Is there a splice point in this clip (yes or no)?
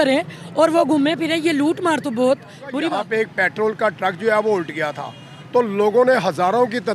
yes